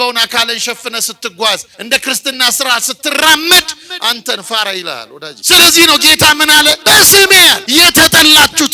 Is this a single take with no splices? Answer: no; 4 cuts; at 1.7 s, 5.3 s, 6.8 s, 7.6 s

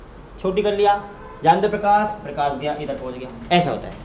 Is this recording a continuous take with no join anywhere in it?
yes; 0 cuts

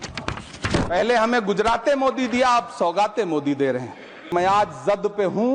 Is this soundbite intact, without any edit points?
no; 1 cut; at 4.3 s

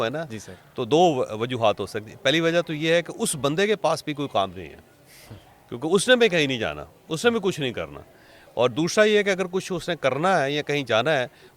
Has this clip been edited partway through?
no; 0 cuts

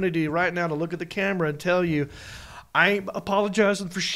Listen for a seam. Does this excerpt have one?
no; 0 cuts

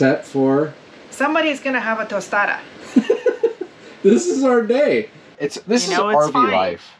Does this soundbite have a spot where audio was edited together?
yes; 1 cut; at 5.4 s

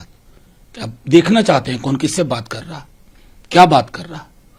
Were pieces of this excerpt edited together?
no; 0 cuts

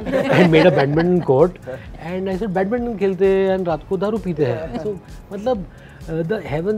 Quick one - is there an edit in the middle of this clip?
no; 0 cuts

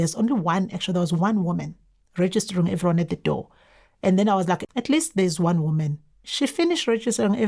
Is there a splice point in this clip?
yes; 2 cuts; at 4.7 s, 6.2 s

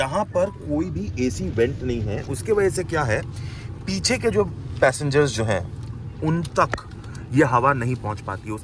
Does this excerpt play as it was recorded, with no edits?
yes; 0 cuts

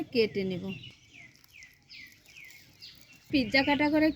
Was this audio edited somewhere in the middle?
yes; 1 cut; at 3.3 s

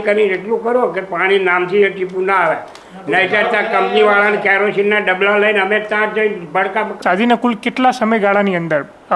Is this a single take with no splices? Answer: no; 1 cut; at 7.0 s

